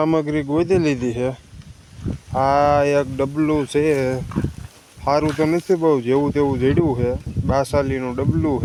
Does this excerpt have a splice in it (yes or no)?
no